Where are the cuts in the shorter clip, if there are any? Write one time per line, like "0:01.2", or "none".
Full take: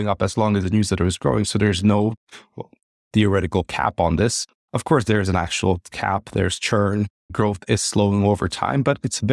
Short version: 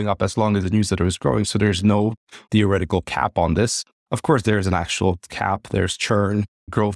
0:02.3